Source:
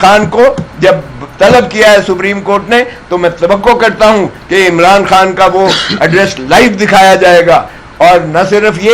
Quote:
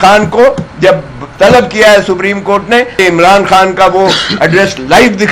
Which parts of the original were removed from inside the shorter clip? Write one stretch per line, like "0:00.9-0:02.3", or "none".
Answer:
0:03.0-0:04.6